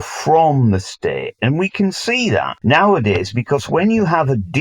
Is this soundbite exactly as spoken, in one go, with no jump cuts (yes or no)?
no